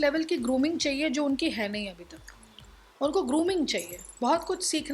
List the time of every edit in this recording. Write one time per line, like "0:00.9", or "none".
none